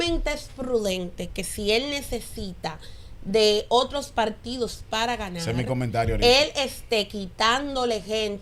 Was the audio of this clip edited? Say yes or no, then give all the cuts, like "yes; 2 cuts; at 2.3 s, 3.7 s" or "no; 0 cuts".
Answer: no; 0 cuts